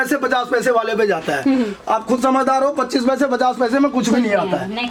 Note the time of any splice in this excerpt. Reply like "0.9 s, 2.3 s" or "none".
none